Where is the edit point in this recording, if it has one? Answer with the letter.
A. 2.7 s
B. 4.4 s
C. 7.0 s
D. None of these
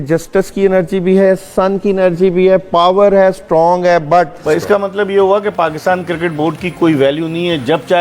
B